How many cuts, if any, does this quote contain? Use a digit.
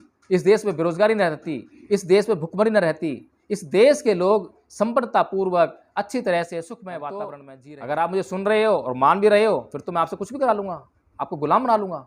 1